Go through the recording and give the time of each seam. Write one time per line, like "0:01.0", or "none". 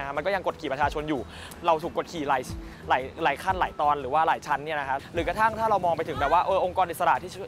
0:01.4
0:05.0